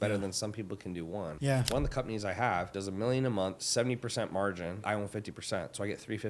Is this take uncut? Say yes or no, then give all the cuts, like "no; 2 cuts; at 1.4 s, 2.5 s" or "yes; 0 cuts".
no; 4 cuts; at 1.6 s, 2.8 s, 3.6 s, 4.8 s